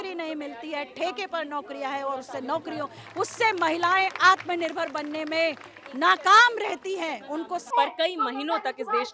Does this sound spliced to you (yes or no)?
yes